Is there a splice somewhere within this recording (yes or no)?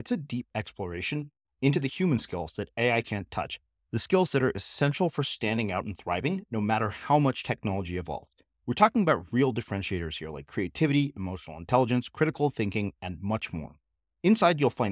no